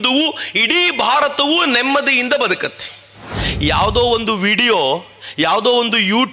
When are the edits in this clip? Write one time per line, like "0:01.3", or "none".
0:03.2